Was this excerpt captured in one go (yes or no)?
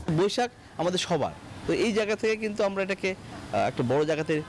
yes